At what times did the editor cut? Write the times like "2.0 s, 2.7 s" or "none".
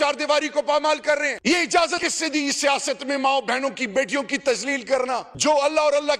1.3 s, 2.0 s, 5.3 s